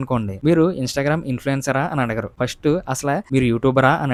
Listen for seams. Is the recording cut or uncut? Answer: uncut